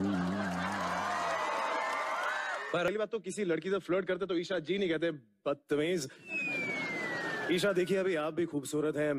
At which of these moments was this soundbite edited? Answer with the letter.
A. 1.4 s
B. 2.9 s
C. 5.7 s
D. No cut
B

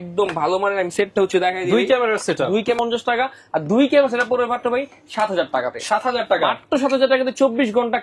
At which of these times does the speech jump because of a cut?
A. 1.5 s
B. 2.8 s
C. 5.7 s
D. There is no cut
B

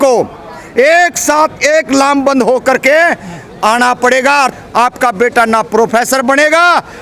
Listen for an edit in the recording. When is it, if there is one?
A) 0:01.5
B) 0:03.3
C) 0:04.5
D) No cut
C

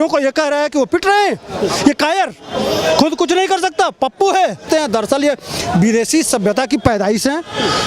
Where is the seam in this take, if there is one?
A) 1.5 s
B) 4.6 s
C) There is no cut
B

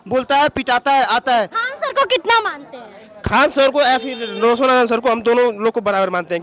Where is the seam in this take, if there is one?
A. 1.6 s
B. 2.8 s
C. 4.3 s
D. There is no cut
A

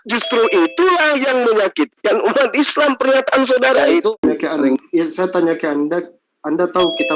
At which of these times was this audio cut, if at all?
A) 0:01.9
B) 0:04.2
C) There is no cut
B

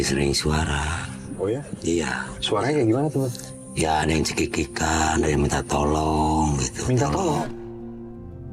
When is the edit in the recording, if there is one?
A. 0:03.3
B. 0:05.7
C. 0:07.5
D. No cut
C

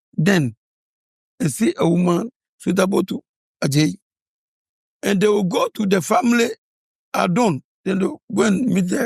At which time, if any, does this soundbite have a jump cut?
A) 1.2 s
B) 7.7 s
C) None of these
B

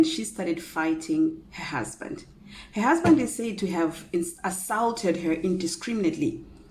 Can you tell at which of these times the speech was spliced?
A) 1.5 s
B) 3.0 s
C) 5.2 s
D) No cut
B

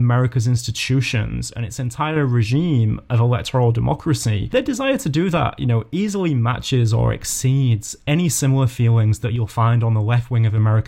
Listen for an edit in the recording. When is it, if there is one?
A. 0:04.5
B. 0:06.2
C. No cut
A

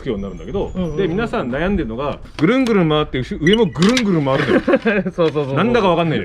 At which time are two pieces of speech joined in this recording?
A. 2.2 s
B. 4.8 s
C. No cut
A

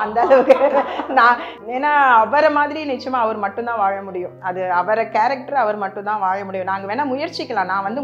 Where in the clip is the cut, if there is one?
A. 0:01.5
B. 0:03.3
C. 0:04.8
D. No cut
A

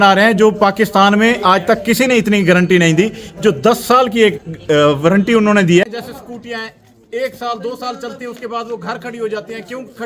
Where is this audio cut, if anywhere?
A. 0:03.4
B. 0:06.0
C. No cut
B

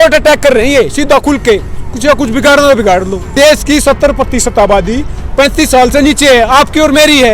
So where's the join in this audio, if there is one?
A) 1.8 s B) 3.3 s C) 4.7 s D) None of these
B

